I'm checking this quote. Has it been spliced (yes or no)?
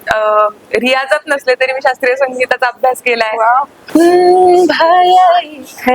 yes